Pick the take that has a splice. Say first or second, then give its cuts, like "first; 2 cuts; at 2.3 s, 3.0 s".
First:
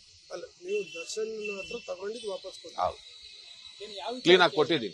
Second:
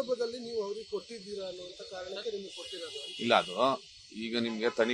second; 1 cut; at 1.8 s